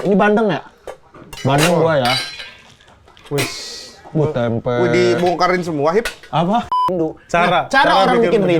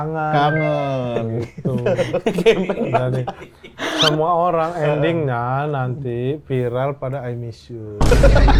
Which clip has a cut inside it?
first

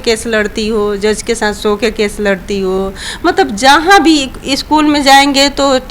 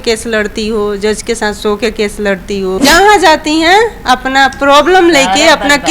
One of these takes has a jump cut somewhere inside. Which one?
second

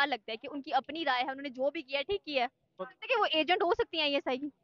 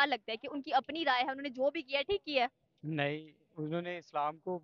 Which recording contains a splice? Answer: first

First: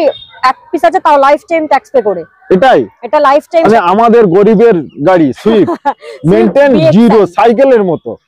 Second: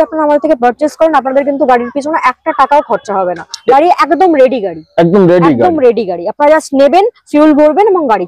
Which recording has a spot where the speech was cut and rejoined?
first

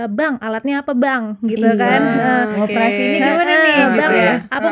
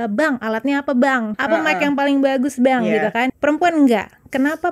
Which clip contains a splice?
second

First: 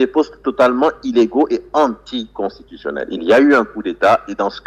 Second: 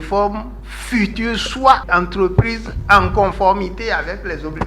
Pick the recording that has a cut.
second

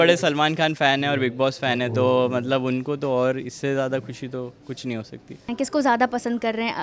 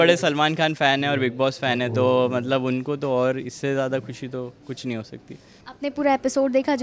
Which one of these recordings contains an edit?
first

